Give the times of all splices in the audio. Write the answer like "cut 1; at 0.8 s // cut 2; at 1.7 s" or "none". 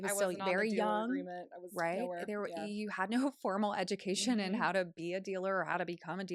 none